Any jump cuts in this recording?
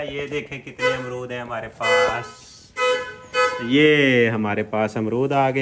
no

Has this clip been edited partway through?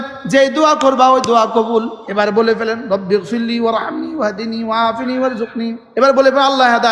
yes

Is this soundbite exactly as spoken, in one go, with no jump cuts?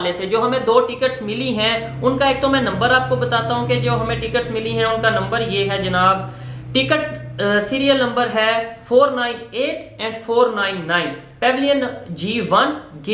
yes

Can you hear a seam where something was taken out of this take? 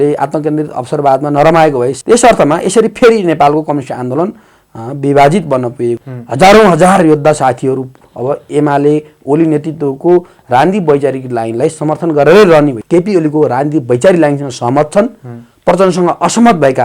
yes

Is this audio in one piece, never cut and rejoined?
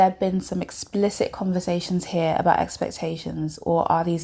yes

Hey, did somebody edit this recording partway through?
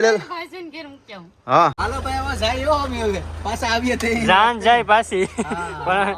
yes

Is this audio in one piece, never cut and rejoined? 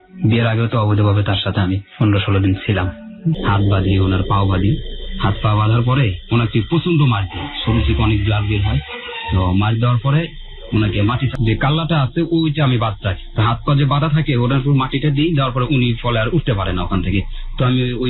no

